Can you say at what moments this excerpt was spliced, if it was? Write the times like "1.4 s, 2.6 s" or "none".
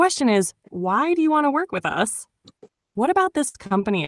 none